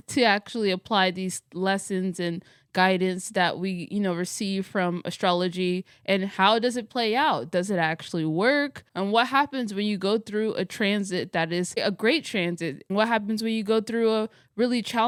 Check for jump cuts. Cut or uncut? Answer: uncut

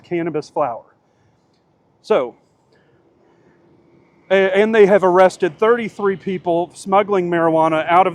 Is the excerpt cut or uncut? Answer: uncut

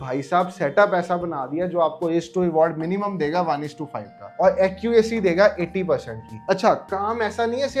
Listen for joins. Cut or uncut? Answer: uncut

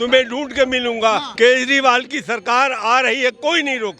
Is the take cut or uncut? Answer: cut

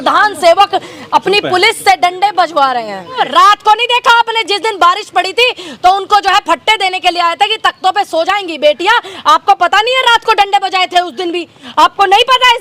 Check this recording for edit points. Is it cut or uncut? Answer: cut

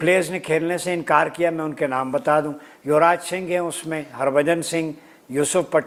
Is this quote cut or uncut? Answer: uncut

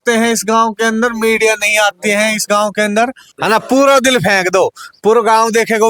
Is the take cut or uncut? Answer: cut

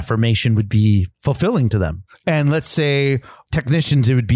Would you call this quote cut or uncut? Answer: cut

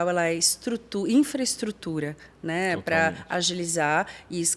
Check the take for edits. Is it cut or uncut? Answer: uncut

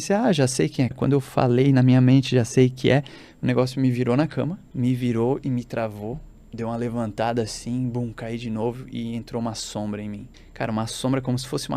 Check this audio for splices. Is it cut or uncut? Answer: cut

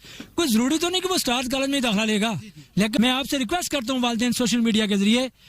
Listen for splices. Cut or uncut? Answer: cut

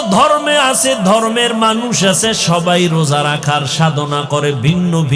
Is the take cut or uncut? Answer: uncut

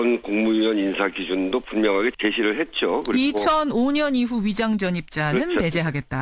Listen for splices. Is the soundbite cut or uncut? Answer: uncut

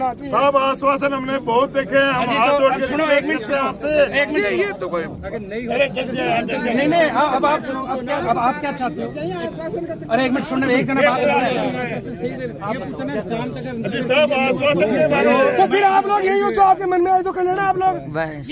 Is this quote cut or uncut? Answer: uncut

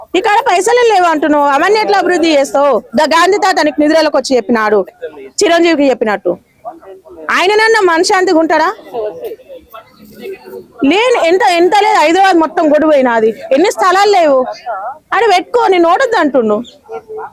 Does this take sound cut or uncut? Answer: uncut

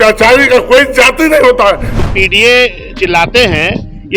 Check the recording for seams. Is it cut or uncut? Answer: cut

